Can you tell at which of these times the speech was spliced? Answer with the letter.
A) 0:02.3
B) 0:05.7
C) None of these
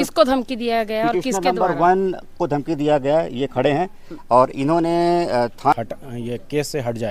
B